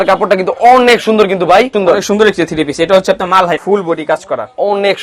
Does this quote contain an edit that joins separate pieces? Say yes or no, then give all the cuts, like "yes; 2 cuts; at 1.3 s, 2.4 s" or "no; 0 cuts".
yes; 2 cuts; at 1.7 s, 3.6 s